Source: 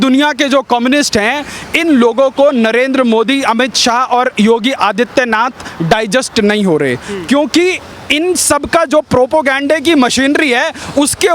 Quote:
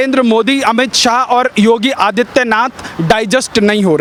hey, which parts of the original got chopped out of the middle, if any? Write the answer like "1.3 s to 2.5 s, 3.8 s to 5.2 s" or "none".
none